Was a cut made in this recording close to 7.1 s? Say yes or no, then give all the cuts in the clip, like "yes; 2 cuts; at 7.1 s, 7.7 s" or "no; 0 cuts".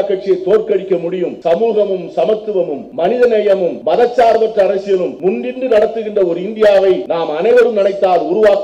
yes; 5 cuts; at 1.3 s, 2.8 s, 3.8 s, 5.1 s, 7.1 s